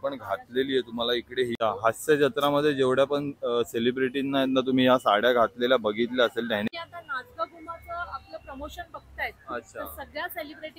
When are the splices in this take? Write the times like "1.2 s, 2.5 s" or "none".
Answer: 1.6 s, 6.7 s